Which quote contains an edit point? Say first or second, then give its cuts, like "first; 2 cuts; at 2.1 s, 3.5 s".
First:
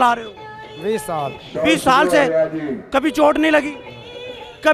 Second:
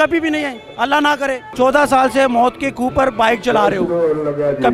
second; 1 cut; at 1.5 s